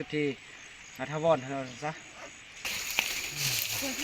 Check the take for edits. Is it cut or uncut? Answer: cut